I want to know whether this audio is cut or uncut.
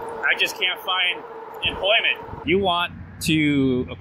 cut